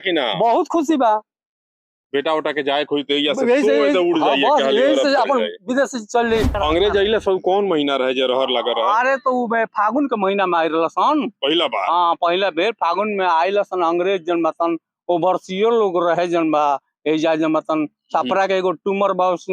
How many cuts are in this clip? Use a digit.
1